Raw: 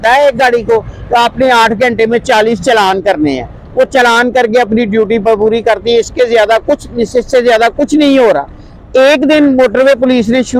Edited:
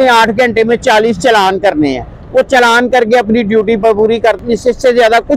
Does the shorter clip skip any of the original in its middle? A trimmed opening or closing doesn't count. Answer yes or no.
yes